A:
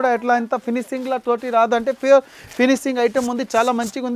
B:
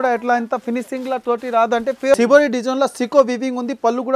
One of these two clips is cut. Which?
B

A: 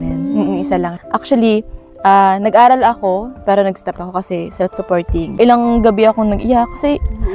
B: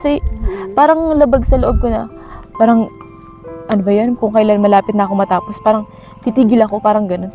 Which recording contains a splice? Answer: A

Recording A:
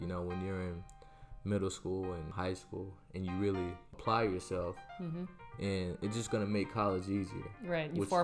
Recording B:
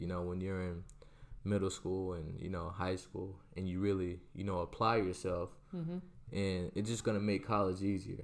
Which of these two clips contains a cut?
A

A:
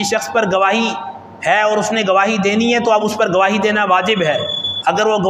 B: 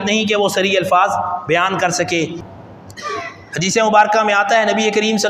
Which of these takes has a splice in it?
B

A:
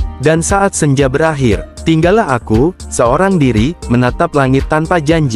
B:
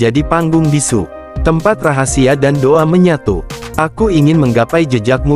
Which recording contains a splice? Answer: B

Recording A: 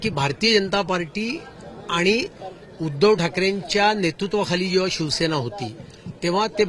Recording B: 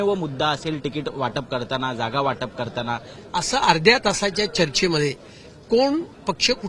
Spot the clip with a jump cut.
B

